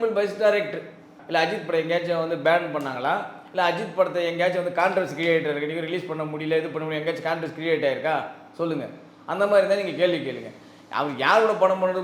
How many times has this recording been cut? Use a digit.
1